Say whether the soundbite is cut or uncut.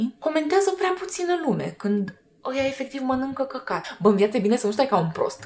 cut